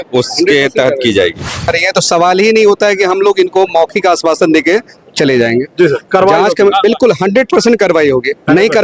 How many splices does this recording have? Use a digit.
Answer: 1